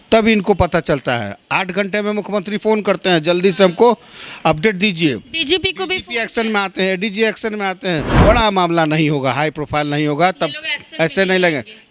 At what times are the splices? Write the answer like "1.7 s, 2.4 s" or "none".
8.2 s